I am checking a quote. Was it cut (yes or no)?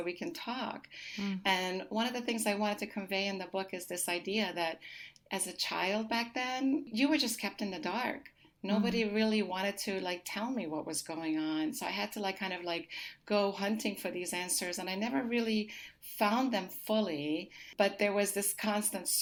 no